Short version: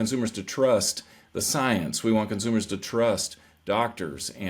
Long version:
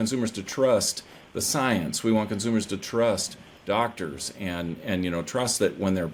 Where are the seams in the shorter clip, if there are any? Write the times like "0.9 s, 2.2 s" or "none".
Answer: none